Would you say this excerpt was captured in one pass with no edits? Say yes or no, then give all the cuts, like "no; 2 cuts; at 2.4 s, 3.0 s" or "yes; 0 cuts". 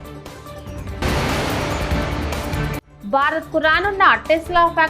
no; 2 cuts; at 1.0 s, 2.9 s